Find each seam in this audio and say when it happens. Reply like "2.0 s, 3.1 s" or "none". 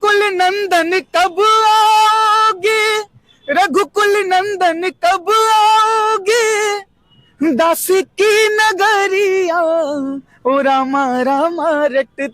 none